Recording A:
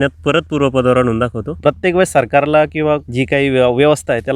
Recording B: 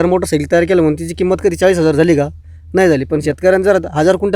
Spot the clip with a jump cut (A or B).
A